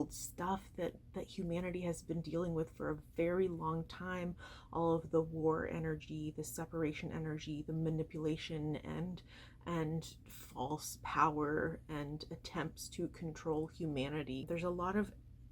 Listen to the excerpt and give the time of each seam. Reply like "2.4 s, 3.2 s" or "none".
14.4 s